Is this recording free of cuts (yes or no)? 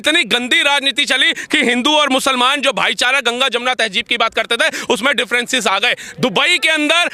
yes